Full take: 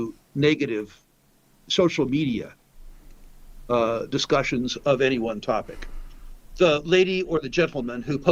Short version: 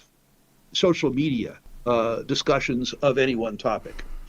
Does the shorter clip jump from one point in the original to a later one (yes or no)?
yes